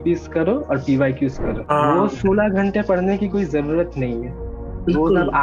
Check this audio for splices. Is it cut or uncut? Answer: cut